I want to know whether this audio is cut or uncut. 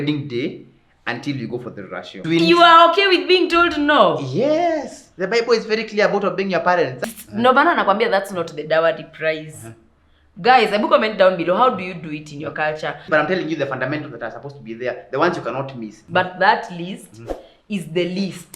cut